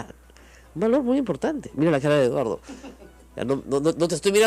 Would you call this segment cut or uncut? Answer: uncut